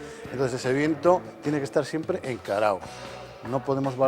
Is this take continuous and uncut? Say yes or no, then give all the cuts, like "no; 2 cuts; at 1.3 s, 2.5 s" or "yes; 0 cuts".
yes; 0 cuts